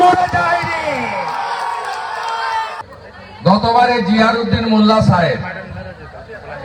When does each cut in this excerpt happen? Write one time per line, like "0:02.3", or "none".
0:02.8

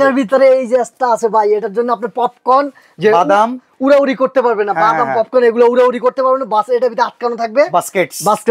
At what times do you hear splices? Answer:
none

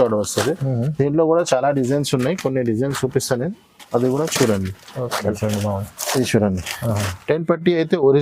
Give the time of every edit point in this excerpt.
0:05.3

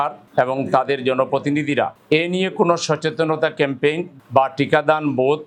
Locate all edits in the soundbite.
none

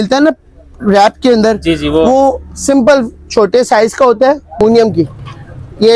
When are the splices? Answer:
0:04.6

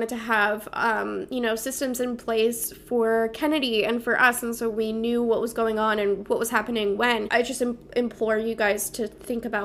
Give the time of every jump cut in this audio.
0:07.3

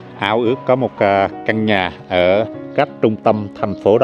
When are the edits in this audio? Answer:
0:02.6

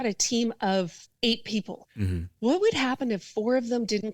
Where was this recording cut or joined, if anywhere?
0:01.0
0:01.8

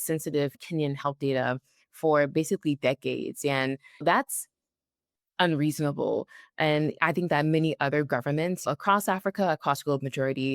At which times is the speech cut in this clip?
0:04.0
0:08.6

